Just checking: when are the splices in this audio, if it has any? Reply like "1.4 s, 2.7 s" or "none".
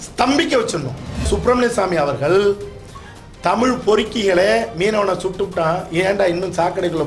1.3 s